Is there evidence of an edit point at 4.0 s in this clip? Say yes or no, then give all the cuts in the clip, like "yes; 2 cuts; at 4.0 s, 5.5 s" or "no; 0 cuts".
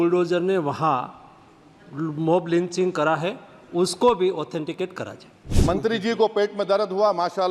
no; 1 cut; at 5.5 s